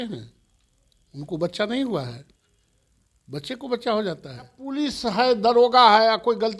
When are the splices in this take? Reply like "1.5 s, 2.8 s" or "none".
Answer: 4.6 s